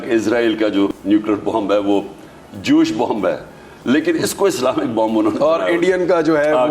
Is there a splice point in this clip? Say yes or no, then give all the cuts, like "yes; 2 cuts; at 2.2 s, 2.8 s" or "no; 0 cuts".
yes; 1 cut; at 1.0 s